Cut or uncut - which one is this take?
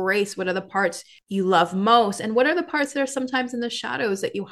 cut